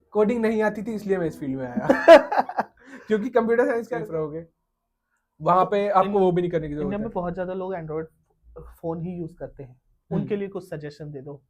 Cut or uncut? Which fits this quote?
cut